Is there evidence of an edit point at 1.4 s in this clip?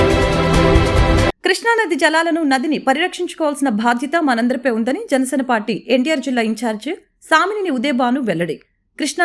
yes; 1 cut; at 1.4 s

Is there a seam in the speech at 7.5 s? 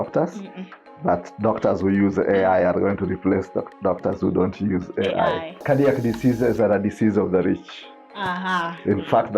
no; 1 cut; at 5.6 s

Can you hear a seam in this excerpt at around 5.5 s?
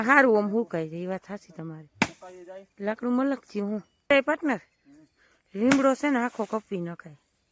no; 1 cut; at 4.1 s

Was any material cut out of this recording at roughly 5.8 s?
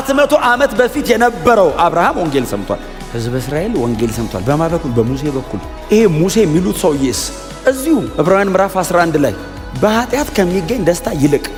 no; 0 cuts

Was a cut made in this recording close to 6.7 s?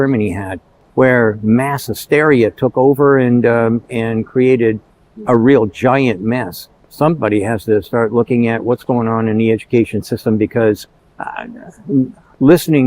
yes; 1 cut; at 6.7 s

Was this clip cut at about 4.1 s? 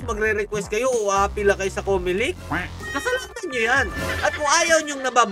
no; 1 cut; at 2.8 s

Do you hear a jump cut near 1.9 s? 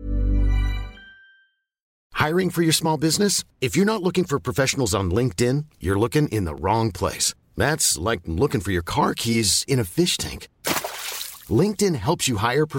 yes; 1 cut; at 1.9 s

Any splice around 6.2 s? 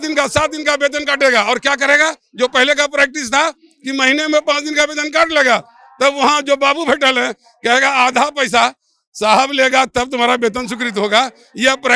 no; 0 cuts

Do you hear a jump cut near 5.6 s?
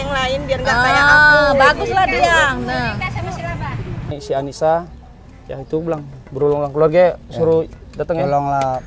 no; 1 cut; at 4.1 s

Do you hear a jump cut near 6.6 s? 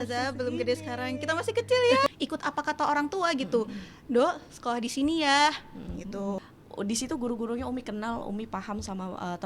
yes; 2 cuts; at 2.1 s, 6.6 s

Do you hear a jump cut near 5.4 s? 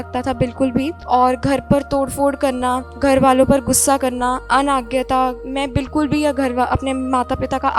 yes; 4 cuts; at 1.0 s, 2.9 s, 4.4 s, 5.4 s

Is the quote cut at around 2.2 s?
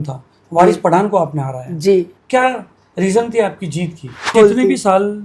yes; 2 cuts; at 2.2 s, 4.3 s

